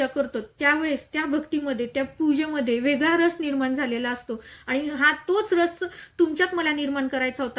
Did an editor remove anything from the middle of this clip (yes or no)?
no